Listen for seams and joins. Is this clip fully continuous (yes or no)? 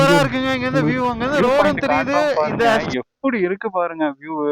no